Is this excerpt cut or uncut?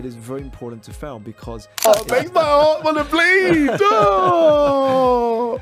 cut